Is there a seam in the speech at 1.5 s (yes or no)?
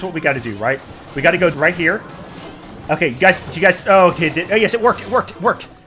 yes